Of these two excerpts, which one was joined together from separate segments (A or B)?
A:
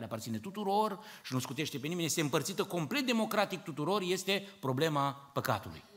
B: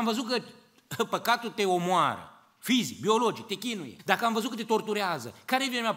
B